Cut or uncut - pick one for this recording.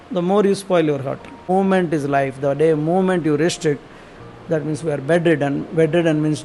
cut